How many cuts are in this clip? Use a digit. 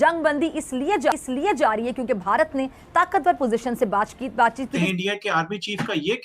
1